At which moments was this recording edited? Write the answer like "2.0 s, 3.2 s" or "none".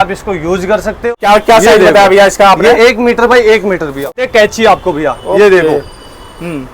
1.0 s, 4.1 s